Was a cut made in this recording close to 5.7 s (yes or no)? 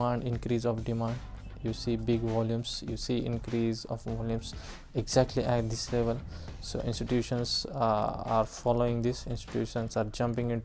no